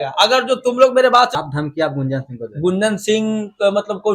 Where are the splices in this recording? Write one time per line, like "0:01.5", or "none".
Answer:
0:01.3